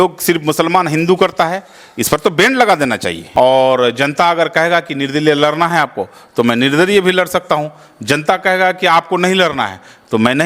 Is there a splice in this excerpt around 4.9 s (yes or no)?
no